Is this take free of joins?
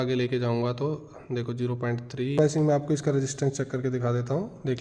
no; 1 cut; at 2.4 s

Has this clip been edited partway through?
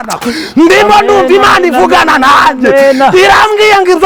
no; 0 cuts

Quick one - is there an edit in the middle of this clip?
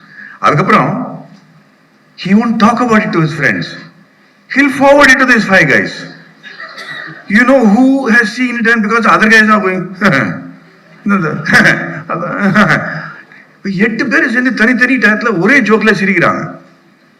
no; 0 cuts

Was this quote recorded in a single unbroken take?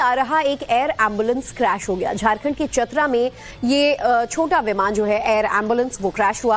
no; 1 cut; at 1.7 s

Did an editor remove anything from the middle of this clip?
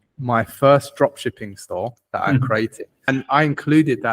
yes; 1 cut; at 3.1 s

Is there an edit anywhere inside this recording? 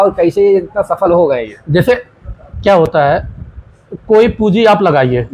no; 0 cuts

